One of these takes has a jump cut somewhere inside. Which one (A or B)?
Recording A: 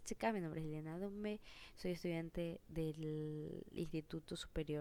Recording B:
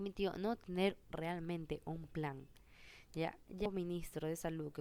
B